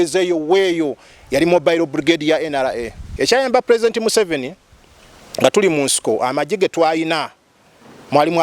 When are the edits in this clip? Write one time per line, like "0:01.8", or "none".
0:03.0